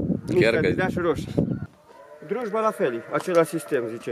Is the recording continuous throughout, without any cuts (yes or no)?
no